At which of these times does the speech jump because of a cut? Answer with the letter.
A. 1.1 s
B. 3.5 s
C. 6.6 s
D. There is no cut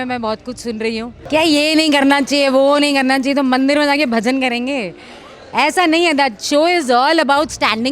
A